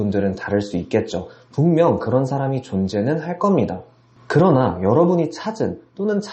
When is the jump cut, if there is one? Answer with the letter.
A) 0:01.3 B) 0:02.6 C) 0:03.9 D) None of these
C